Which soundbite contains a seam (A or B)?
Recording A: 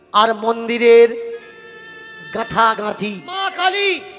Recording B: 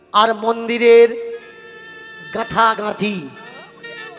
A